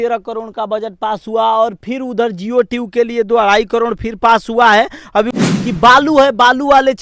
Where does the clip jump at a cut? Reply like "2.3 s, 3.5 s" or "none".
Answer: 5.4 s